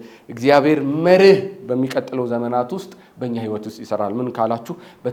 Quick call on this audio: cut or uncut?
uncut